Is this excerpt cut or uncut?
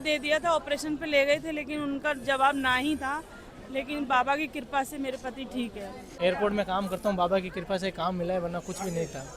cut